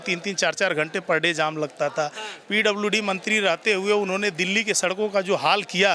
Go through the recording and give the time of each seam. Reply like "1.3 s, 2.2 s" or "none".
none

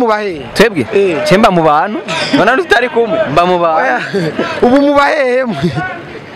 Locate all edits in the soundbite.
none

